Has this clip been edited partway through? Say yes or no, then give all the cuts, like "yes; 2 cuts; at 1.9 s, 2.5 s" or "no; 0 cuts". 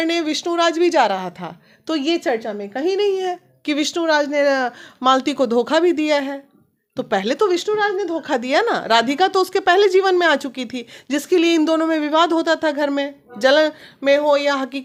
no; 0 cuts